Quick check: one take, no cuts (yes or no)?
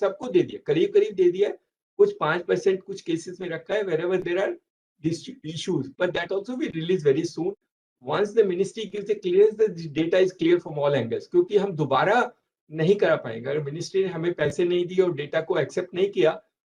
yes